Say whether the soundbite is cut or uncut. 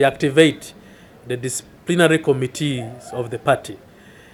uncut